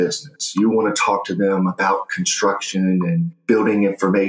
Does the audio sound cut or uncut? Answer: uncut